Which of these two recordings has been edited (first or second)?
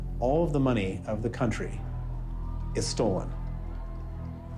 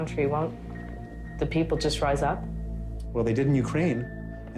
second